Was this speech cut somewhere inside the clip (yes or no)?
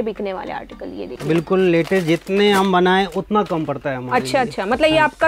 yes